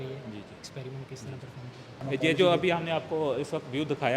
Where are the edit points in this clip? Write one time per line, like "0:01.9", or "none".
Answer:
0:02.0